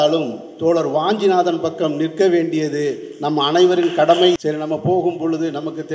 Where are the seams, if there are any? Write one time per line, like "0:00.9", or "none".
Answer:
0:04.3